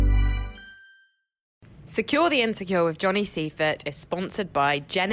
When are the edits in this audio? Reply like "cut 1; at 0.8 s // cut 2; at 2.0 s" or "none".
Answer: cut 1; at 1.6 s